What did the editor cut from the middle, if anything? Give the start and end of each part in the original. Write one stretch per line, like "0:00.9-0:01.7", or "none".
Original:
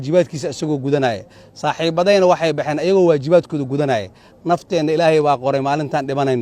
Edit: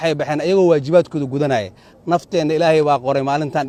none